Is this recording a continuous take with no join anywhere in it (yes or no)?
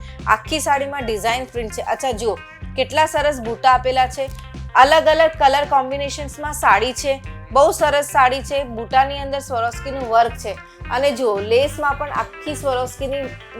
yes